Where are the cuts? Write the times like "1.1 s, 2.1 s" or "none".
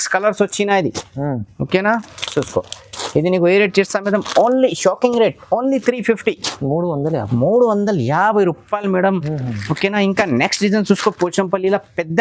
none